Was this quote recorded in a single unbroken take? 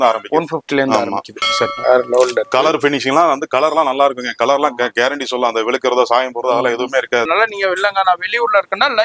no; 2 cuts; at 1.8 s, 7.3 s

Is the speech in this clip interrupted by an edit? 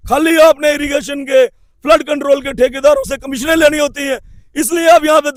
no; 0 cuts

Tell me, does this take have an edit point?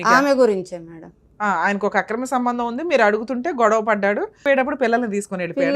yes; 1 cut; at 4.4 s

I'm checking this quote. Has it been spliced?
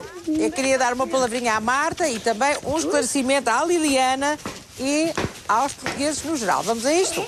yes; 1 cut; at 6.3 s

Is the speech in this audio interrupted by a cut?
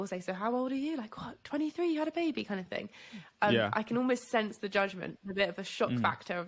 no; 0 cuts

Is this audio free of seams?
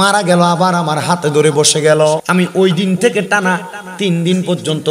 no; 1 cut; at 2.2 s

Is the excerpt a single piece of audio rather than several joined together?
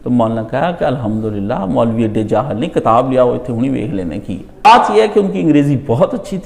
no; 1 cut; at 4.7 s

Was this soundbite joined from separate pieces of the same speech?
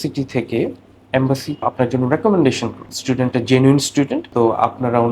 yes; 3 cuts; at 1.6 s, 2.9 s, 4.2 s

